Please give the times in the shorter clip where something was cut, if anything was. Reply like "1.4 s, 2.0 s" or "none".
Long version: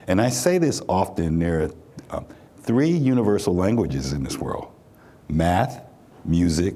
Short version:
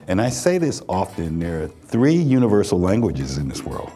1.7 s